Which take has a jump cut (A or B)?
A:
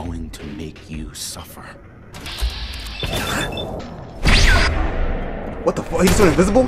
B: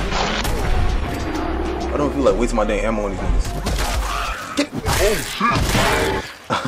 A